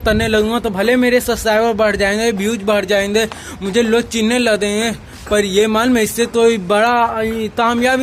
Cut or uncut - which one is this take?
uncut